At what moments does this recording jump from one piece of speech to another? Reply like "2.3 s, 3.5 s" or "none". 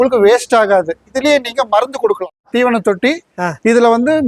1.1 s, 2.5 s